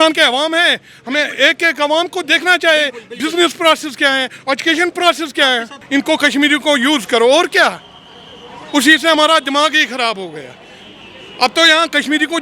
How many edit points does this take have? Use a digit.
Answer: 1